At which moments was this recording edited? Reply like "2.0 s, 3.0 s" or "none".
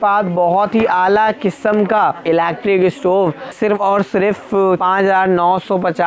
2.2 s, 3.5 s, 4.8 s